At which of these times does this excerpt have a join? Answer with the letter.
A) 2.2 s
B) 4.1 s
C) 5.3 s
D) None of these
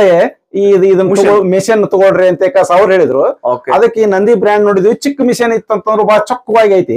D